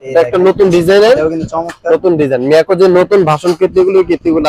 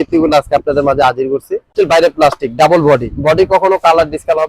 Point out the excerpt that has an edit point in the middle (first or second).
second